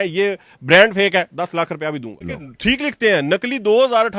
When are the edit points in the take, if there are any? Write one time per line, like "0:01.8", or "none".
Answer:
0:02.2